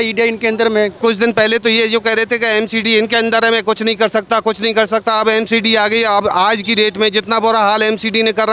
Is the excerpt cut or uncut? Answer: cut